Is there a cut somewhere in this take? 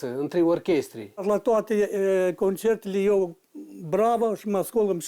yes; 1 cut; at 1.2 s

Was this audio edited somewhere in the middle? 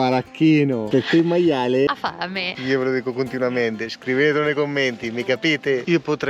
yes; 1 cut; at 2.5 s

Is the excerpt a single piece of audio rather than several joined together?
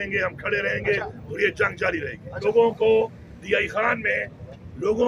no; 1 cut; at 2.4 s

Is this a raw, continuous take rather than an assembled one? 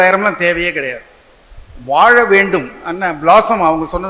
yes; 0 cuts

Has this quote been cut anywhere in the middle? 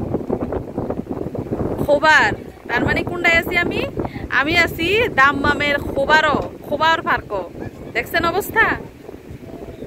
no; 0 cuts

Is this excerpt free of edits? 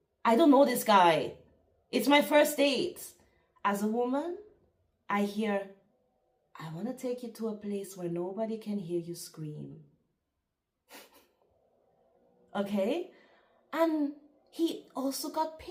yes; 0 cuts

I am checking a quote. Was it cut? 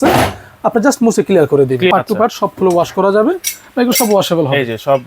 yes; 1 cut; at 1.9 s

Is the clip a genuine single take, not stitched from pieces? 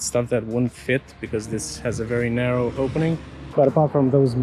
yes; 0 cuts

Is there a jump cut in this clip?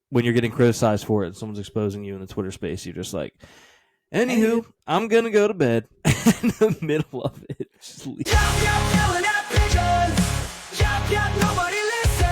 yes; 1 cut; at 8.3 s

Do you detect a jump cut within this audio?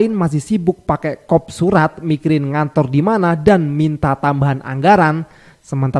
no; 0 cuts

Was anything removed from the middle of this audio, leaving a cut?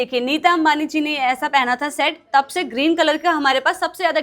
no; 0 cuts

